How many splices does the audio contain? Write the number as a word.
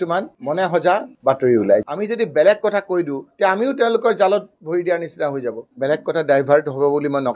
two